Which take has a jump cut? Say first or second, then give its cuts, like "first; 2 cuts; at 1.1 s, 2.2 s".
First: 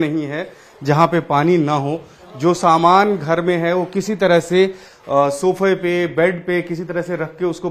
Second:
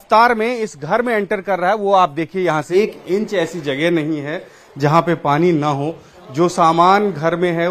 second; 1 cut; at 2.7 s